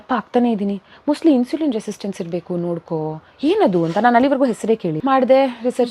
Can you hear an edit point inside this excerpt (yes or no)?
yes